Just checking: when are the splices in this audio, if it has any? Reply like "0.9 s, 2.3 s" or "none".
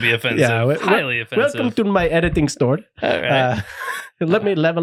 none